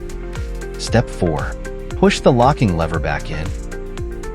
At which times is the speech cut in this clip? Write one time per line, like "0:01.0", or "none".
0:00.9
0:03.3